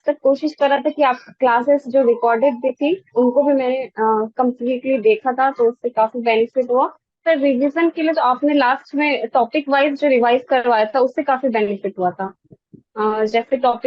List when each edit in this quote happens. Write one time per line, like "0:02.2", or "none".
0:07.1